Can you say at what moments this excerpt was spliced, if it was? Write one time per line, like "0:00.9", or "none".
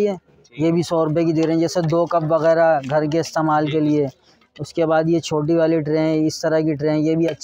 none